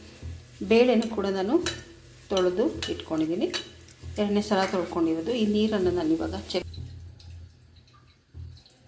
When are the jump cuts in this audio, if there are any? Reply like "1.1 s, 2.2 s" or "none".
6.6 s

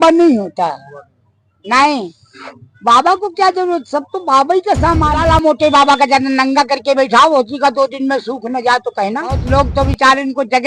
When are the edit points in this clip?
5.2 s, 9.4 s

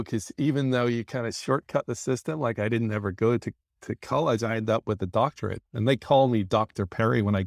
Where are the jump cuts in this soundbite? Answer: none

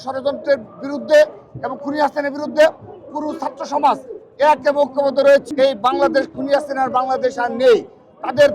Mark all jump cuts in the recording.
5.5 s

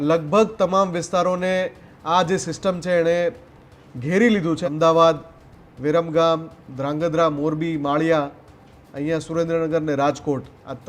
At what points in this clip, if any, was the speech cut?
4.6 s

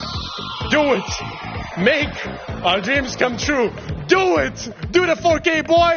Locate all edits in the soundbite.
none

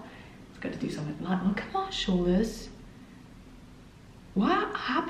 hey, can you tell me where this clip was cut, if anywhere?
none

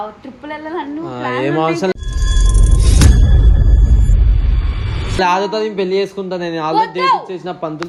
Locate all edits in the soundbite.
none

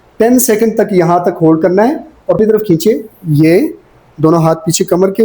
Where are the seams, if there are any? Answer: 2.4 s

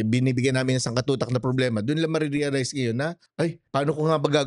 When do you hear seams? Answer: 3.4 s

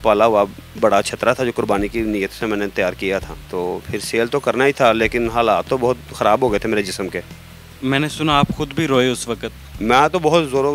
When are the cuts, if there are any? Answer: none

